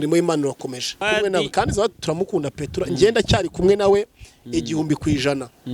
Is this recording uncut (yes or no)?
no